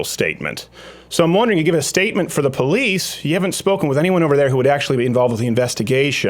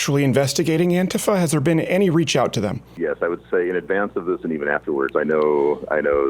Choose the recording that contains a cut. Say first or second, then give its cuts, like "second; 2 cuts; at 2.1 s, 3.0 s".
second; 1 cut; at 2.9 s